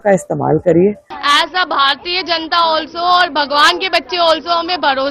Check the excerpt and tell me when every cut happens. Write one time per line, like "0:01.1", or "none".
0:01.1